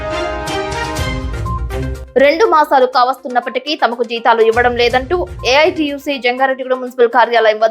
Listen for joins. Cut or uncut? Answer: cut